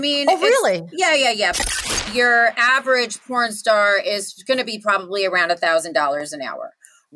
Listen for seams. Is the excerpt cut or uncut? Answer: cut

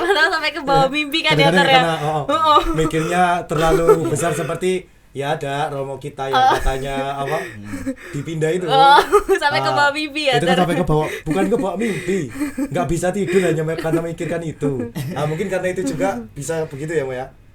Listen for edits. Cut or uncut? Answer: uncut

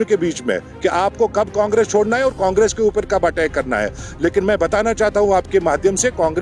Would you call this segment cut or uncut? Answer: uncut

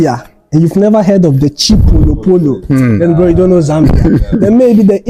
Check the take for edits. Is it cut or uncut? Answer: uncut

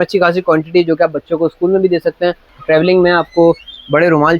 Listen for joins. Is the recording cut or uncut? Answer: cut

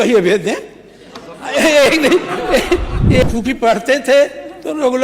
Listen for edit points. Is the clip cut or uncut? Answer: cut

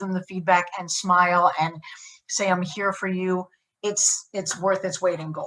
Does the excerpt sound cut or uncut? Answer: uncut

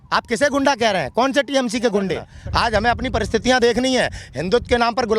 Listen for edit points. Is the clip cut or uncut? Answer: cut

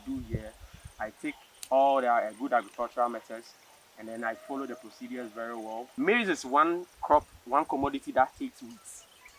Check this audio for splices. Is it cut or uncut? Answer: cut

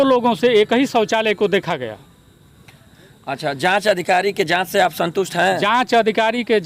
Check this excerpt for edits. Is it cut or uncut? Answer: uncut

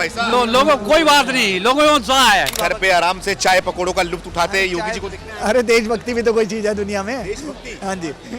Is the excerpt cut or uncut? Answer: cut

